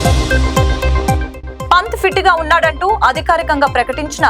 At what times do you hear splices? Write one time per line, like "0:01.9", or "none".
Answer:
none